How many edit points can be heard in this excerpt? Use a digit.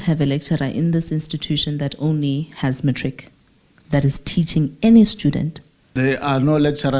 1